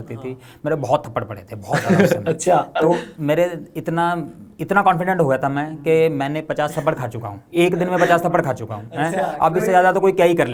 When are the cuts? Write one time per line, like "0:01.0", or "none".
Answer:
none